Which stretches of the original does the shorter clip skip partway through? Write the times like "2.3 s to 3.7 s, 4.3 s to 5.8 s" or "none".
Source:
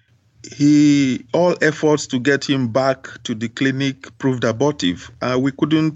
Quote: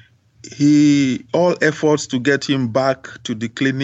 none